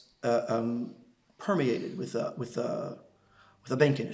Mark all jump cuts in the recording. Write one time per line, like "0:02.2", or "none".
none